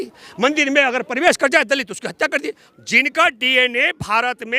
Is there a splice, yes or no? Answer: yes